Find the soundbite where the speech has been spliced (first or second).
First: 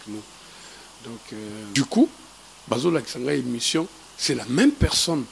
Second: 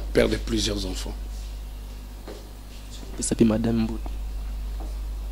first